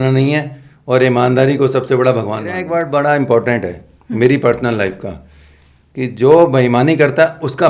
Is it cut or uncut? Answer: cut